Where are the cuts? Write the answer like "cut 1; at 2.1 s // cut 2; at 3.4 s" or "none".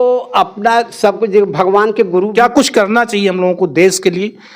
cut 1; at 2.3 s